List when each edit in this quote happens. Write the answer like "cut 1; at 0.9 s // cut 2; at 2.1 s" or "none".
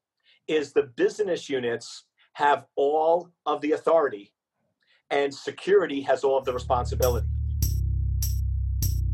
cut 1; at 7.4 s

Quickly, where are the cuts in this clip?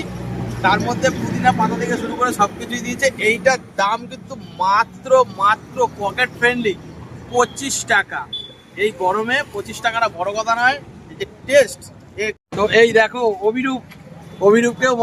cut 1; at 12.5 s

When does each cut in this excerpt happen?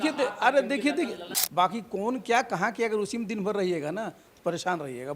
cut 1; at 1.2 s

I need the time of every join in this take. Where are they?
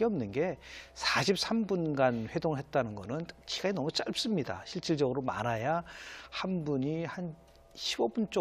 none

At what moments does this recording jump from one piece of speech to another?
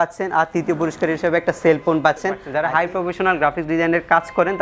cut 1; at 2.5 s

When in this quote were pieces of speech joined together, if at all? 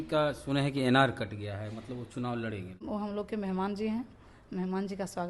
cut 1; at 2.8 s

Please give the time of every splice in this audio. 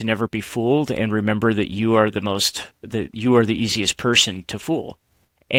none

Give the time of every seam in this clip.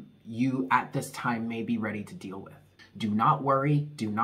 cut 1; at 2.8 s

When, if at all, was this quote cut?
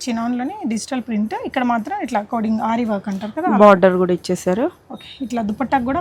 none

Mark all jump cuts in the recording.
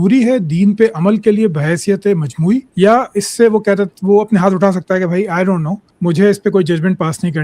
cut 1; at 2.7 s // cut 2; at 5.8 s

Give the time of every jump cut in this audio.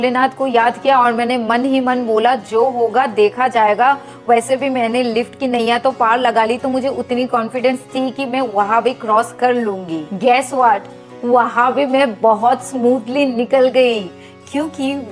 none

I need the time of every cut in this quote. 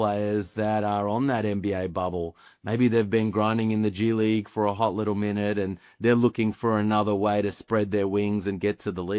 none

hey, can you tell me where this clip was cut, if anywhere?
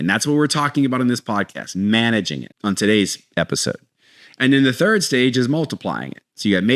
cut 1; at 2.4 s

